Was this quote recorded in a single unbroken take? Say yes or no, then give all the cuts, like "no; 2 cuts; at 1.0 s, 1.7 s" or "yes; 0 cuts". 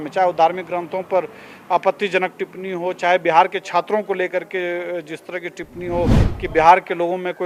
yes; 0 cuts